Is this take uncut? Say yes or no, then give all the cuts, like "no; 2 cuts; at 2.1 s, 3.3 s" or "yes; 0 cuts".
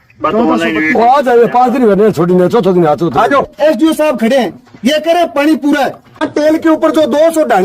no; 2 cuts; at 3.5 s, 6.2 s